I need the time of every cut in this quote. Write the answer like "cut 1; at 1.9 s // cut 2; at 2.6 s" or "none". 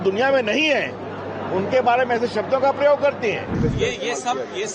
cut 1; at 3.5 s